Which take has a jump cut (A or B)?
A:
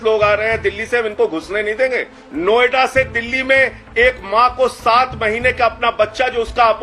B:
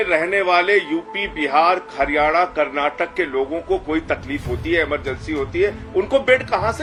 A